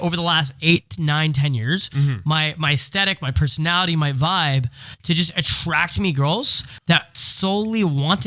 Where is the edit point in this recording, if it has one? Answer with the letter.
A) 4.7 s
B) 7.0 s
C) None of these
B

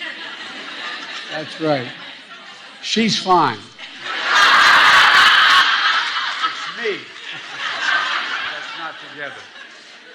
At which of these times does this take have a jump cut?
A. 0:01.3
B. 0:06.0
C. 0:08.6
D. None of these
B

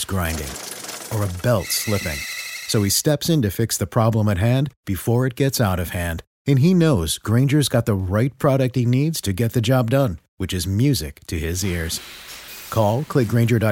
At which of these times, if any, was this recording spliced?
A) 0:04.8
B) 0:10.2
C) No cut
C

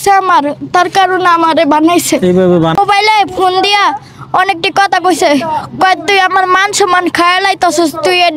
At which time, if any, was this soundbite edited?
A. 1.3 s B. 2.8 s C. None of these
B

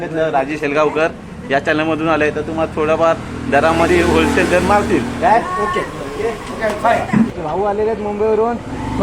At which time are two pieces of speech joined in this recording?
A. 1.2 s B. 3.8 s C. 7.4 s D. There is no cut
C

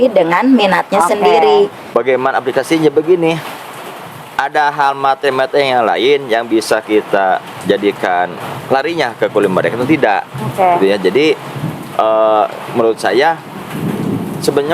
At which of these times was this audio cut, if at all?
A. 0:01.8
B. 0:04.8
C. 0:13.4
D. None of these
A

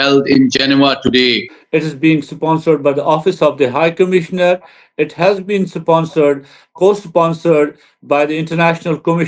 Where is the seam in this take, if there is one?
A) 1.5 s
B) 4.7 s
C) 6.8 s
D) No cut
A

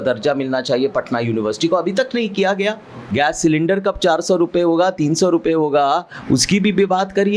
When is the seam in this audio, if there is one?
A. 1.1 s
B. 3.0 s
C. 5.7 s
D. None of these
B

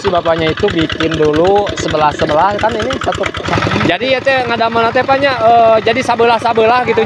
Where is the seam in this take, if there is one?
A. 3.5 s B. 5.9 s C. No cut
A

